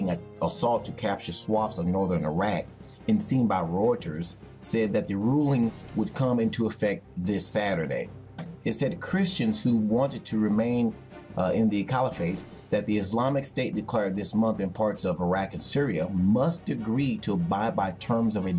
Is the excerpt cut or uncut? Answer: cut